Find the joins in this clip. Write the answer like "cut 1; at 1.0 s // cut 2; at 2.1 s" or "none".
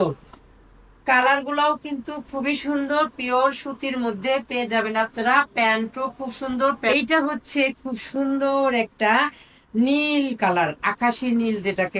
cut 1; at 6.9 s